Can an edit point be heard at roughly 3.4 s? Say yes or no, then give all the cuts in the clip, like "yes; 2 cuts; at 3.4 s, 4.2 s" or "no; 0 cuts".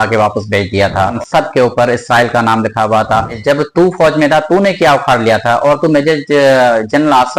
yes; 2 cuts; at 1.1 s, 3.4 s